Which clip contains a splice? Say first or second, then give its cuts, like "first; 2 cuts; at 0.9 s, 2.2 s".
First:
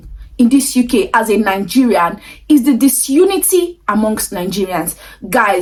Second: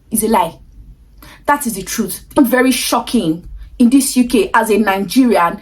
second; 1 cut; at 2.4 s